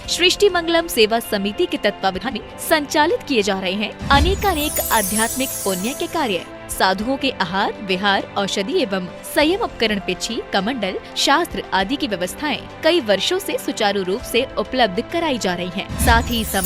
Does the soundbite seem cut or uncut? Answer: cut